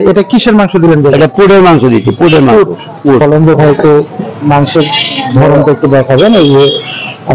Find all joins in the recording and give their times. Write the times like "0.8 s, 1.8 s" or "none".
3.2 s